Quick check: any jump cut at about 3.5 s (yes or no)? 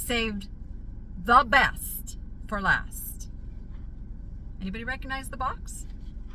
no